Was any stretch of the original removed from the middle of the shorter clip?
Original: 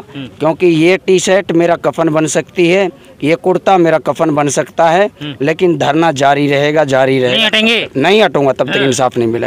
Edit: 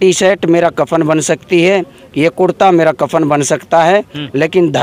no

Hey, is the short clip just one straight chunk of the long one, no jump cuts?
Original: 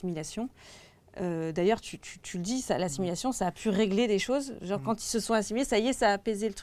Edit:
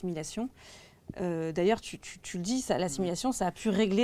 yes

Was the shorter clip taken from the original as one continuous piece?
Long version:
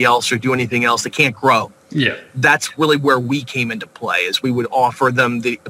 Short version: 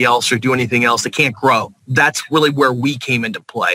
no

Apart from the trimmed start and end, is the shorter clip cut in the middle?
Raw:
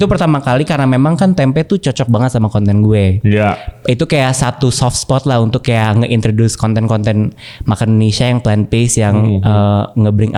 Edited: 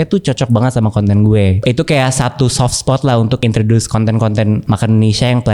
yes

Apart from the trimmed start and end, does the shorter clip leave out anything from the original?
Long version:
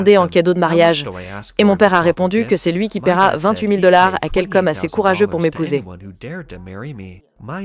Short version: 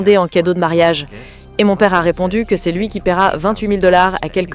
no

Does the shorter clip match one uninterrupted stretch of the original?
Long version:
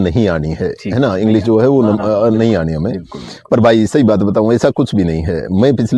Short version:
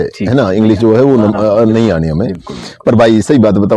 yes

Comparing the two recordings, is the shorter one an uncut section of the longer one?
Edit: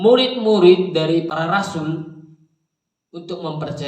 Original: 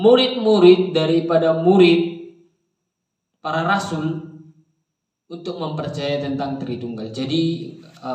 no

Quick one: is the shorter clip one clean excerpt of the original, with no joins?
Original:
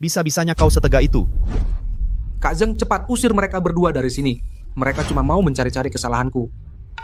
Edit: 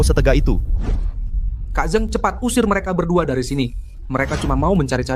yes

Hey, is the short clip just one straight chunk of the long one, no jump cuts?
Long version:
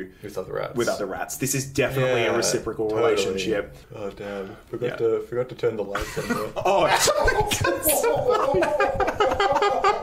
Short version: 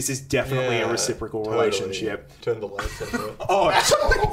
no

